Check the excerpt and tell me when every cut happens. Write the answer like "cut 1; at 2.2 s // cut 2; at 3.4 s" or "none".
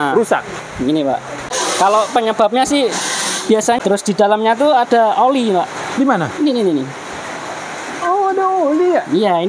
cut 1; at 1.5 s // cut 2; at 3.8 s

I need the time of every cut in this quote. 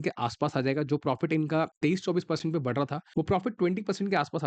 cut 1; at 1.7 s // cut 2; at 3.0 s

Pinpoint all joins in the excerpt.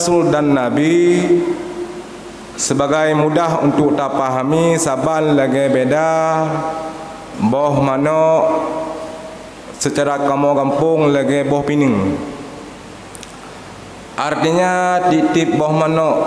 none

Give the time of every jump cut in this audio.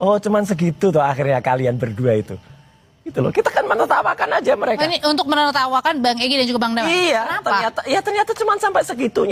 none

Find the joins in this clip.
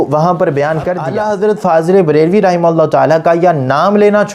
cut 1; at 1.1 s

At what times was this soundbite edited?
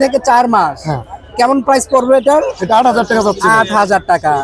none

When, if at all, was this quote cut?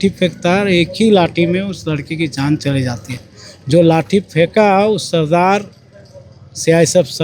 none

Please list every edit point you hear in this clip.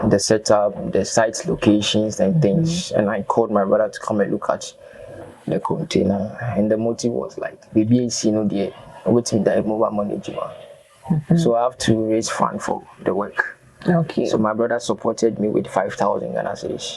none

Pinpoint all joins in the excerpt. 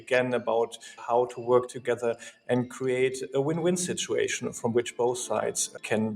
cut 1; at 1.0 s

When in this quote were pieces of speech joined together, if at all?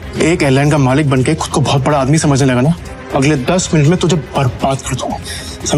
cut 1; at 2.9 s

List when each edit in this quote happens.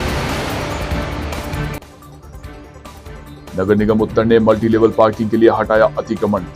cut 1; at 2.0 s

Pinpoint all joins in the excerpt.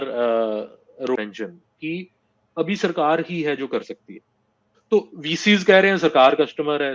cut 1; at 1.2 s

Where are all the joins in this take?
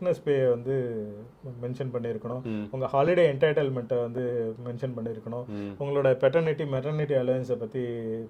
none

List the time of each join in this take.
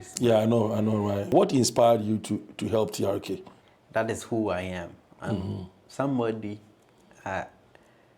cut 1; at 1.3 s // cut 2; at 3.5 s

